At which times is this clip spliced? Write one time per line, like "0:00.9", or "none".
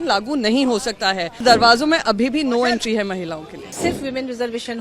0:01.4
0:03.8